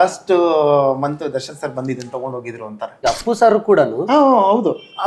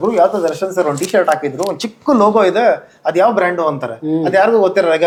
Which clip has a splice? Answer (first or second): first